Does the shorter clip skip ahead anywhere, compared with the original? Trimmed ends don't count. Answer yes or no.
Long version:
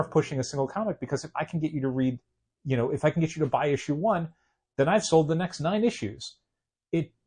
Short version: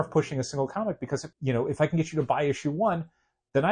yes